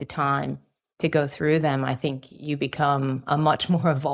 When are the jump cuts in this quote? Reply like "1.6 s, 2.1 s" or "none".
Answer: none